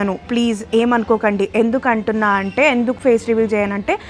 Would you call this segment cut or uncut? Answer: uncut